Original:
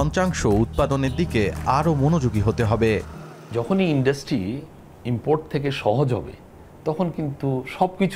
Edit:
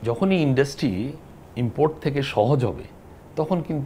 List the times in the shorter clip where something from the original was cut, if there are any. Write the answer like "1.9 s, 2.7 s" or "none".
none

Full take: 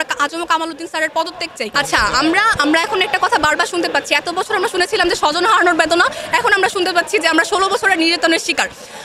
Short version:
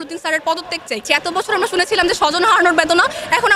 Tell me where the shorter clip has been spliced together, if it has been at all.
1.0 s

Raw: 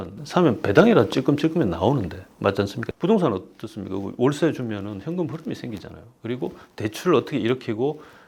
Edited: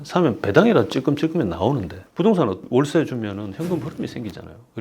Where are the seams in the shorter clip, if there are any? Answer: 2.0 s, 2.6 s

